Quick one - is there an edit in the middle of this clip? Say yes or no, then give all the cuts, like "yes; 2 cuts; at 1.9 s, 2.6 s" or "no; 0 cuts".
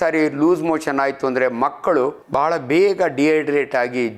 yes; 1 cut; at 2.2 s